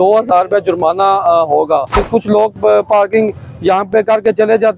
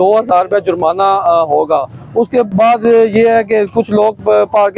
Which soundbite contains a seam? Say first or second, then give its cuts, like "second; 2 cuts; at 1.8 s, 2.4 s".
first; 1 cut; at 2.0 s